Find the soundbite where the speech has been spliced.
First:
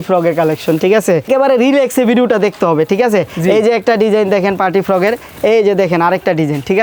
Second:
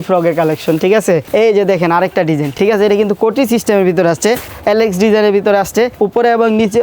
second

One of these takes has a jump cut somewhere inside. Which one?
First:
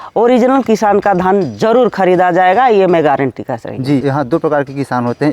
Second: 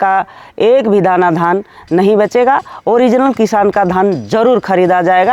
first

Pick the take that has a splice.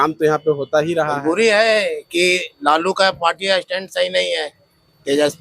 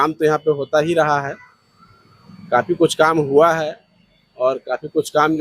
first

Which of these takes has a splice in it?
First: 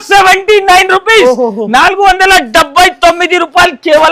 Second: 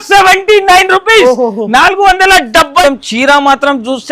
second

